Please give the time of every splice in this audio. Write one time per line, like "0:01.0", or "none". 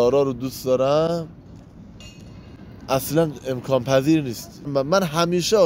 0:04.7